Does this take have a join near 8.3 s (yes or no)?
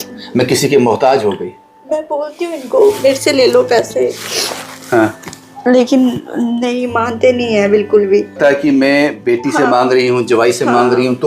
yes